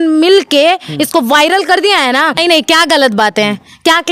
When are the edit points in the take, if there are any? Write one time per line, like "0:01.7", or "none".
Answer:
0:02.4

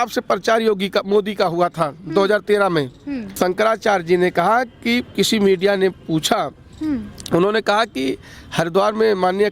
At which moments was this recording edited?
0:03.2

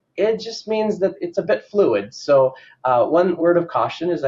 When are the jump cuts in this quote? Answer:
0:01.1
0:03.3

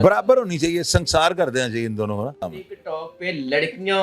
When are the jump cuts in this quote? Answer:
0:02.5

